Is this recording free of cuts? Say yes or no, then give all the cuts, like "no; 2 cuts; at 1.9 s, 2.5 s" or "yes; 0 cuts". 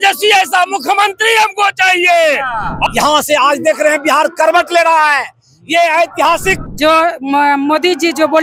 no; 2 cuts; at 2.9 s, 6.6 s